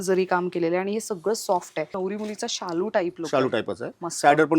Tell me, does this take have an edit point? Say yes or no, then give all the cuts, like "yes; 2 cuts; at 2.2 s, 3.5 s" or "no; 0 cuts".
yes; 1 cut; at 1.9 s